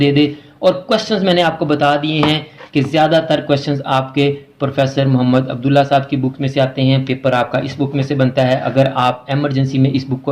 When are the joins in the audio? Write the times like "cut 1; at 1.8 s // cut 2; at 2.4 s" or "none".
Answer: none

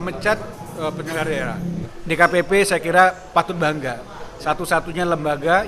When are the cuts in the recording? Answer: cut 1; at 1.8 s

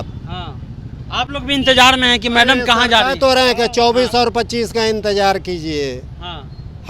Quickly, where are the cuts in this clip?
none

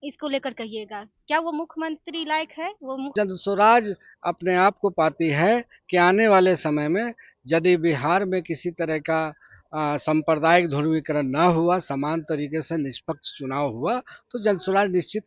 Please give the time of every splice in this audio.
cut 1; at 3.1 s

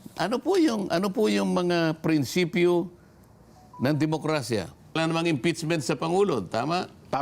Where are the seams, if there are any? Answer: cut 1; at 5.0 s

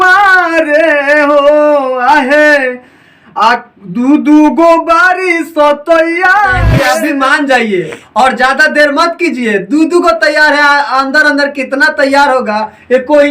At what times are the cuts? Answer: cut 1; at 6.7 s

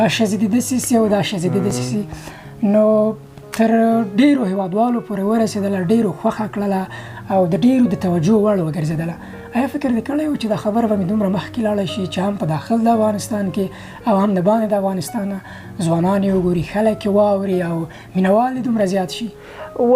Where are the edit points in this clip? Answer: none

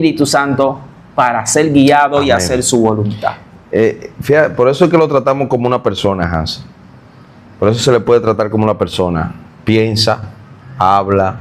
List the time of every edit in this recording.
none

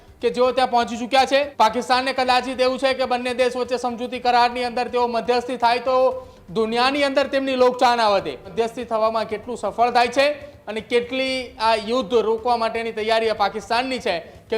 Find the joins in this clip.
cut 1; at 1.5 s // cut 2; at 8.4 s

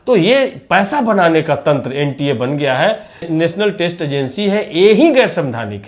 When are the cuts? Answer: cut 1; at 3.3 s

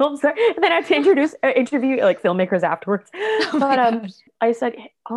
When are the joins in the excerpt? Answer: cut 1; at 4.2 s

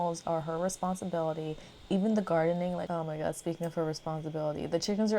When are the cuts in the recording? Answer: cut 1; at 2.8 s

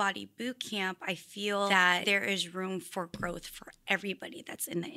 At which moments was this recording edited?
cut 1; at 1.9 s

